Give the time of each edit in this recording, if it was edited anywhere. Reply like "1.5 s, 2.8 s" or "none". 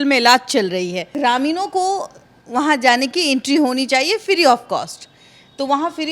1.1 s